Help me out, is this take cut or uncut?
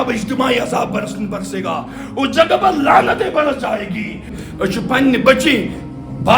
cut